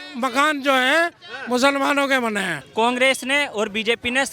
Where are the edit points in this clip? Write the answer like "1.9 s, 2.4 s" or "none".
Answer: 2.6 s